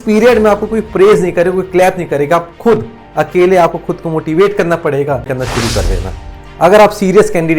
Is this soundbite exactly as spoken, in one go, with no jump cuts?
no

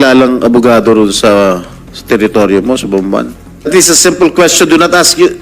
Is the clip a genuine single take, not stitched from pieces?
no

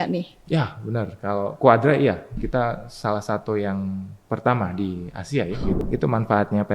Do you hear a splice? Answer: yes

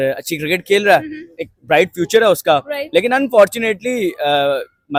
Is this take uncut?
yes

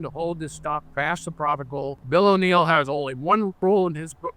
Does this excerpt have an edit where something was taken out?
yes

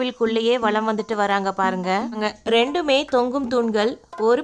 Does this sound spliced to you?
yes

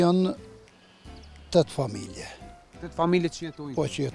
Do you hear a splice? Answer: no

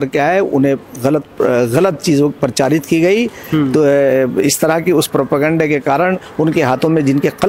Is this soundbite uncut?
yes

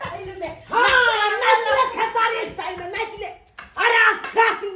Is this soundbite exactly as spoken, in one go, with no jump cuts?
yes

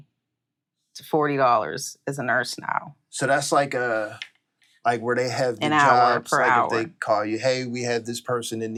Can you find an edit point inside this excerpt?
no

